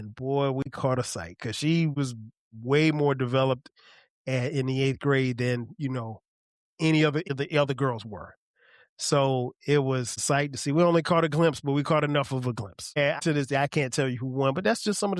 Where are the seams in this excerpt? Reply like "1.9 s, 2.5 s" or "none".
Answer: 2.0 s, 7.3 s, 10.1 s, 13.2 s